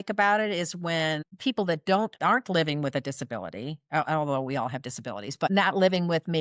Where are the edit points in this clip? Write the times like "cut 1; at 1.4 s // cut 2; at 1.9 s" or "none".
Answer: cut 1; at 1.3 s // cut 2; at 2.2 s // cut 3; at 5.5 s